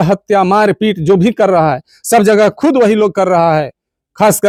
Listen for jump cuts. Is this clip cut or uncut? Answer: uncut